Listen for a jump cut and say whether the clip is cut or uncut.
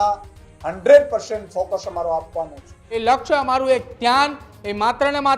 cut